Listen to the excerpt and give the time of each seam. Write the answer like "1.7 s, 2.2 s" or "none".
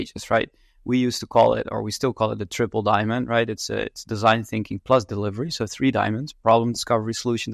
none